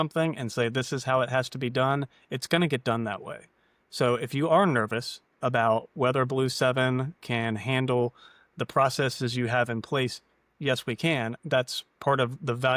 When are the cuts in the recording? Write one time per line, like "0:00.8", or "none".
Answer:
none